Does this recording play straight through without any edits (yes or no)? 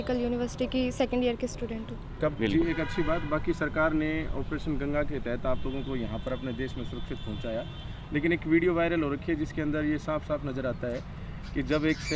no